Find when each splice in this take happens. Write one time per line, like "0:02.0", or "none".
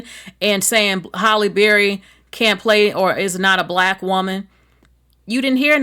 none